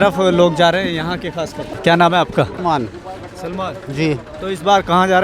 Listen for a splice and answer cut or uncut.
cut